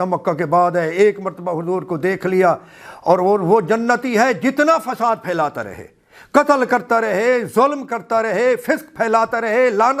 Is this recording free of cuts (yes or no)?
yes